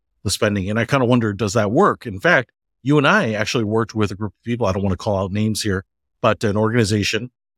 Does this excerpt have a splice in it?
no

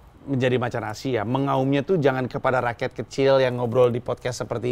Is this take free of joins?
yes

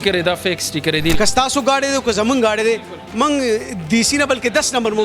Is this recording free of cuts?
no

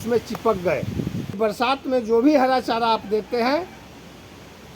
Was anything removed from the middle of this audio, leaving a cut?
yes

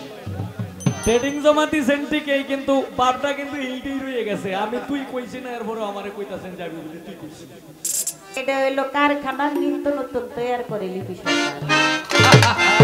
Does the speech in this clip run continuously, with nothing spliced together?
no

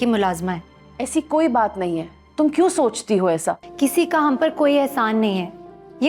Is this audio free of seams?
no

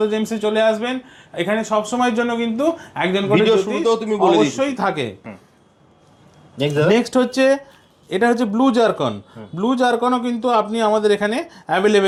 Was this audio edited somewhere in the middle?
no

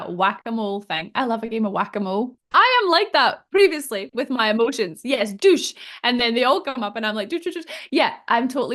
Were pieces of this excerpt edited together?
yes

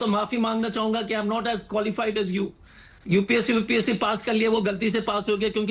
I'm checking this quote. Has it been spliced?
no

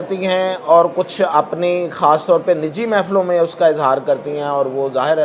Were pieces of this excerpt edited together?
no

